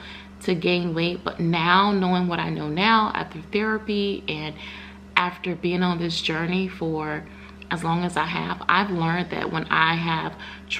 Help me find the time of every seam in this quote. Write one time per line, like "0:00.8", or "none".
none

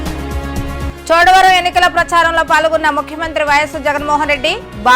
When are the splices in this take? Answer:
0:00.9

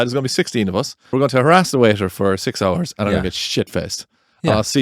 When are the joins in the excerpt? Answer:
0:01.1

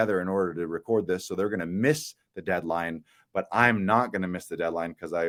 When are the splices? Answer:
none

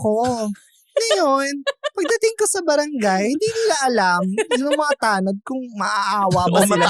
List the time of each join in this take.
none

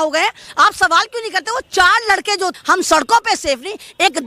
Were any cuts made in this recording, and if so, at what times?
0:02.6

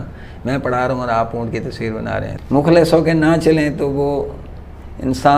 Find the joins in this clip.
0:02.3

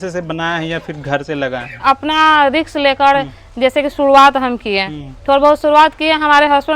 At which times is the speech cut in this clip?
0:01.8

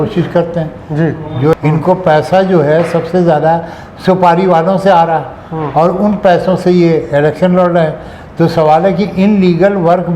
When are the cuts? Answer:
0:01.5

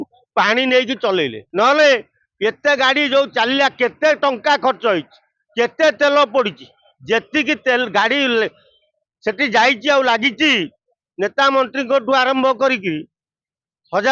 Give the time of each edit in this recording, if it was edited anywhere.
0:01.4

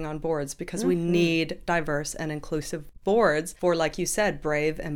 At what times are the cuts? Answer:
0:03.5

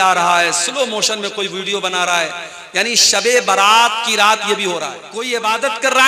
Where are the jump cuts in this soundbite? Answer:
0:05.1

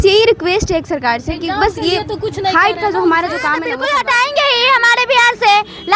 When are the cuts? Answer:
0:03.7

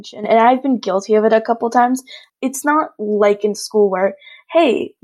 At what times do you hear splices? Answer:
0:02.2

